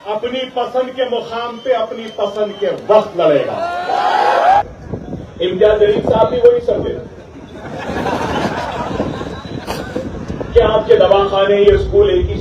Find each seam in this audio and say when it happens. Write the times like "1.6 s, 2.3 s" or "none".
4.6 s